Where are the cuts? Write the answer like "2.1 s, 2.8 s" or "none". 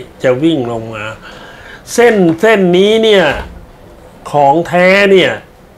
none